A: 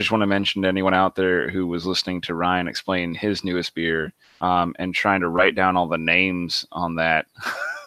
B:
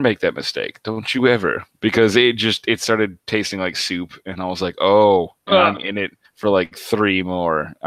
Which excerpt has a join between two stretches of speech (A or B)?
B